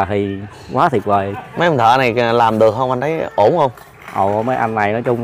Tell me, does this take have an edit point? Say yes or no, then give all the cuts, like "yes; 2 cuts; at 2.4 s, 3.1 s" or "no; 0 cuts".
no; 0 cuts